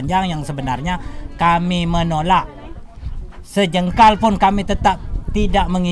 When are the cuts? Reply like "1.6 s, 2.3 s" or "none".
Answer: none